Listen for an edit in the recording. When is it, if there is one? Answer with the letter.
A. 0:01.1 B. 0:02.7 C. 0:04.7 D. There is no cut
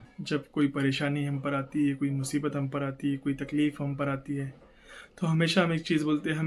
D